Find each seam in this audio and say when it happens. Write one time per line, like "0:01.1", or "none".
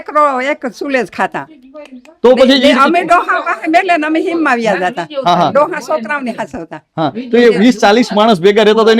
none